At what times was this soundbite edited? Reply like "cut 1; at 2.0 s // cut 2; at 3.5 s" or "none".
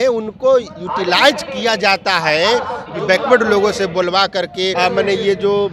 cut 1; at 2.8 s // cut 2; at 4.7 s